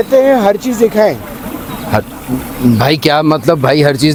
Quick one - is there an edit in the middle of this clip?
no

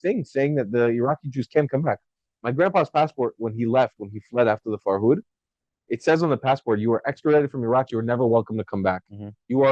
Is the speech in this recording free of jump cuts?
yes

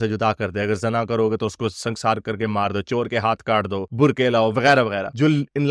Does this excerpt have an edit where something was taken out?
no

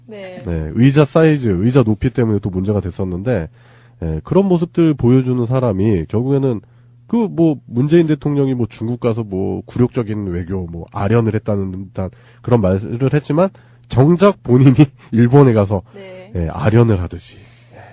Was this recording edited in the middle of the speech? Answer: yes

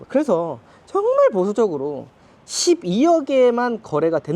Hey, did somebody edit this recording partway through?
no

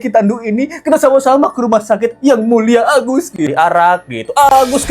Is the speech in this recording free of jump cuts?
no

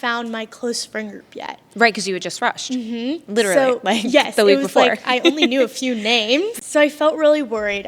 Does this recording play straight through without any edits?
no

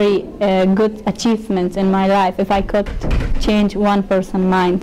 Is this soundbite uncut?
yes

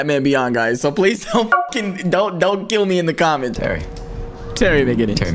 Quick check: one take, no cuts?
no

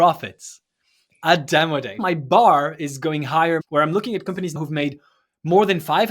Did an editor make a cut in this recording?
yes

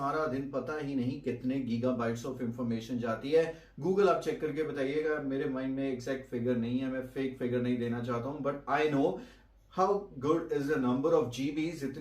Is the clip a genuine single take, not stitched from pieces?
yes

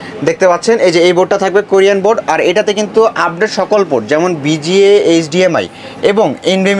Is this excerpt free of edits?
yes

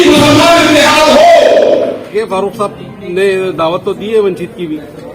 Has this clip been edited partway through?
yes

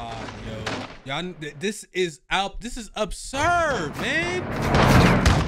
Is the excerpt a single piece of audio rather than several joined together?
yes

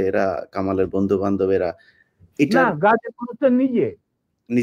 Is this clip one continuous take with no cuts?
yes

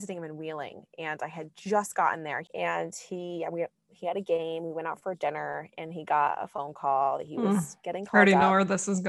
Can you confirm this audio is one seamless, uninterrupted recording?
no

